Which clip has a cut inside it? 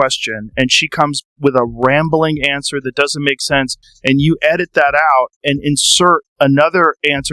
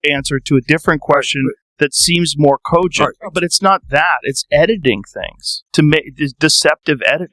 second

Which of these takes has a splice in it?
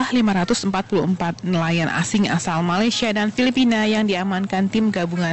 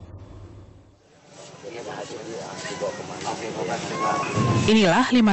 second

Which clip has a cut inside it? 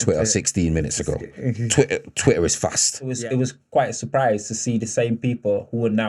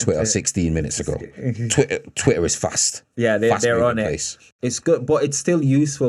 first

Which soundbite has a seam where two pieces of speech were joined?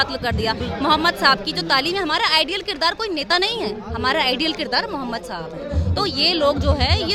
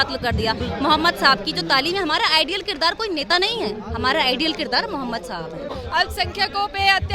second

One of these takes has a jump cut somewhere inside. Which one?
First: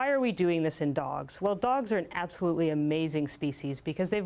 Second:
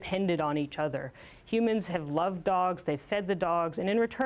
first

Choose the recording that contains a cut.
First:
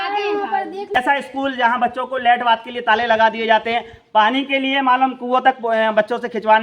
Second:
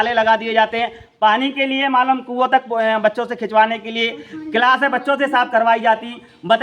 first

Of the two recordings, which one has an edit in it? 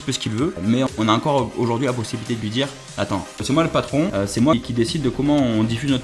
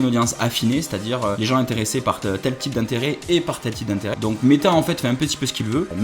second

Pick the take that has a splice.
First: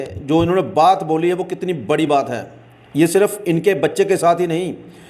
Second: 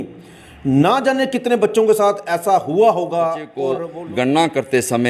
second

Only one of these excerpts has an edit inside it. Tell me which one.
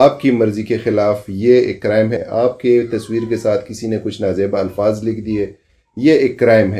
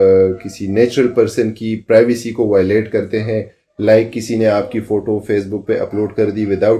first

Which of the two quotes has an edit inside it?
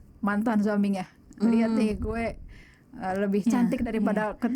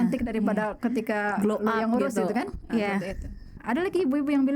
second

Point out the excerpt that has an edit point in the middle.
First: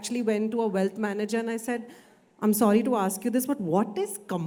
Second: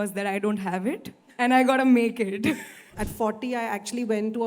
second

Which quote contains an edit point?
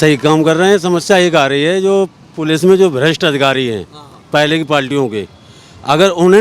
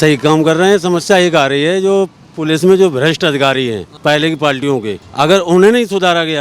second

